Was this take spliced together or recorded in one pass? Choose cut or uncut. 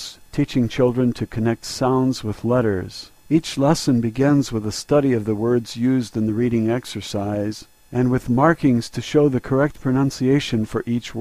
cut